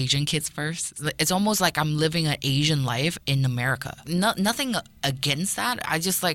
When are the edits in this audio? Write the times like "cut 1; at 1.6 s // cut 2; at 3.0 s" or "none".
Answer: cut 1; at 1.0 s // cut 2; at 4.0 s